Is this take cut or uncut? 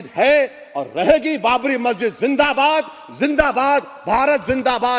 uncut